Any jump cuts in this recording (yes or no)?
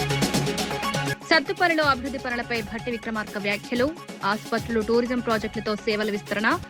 yes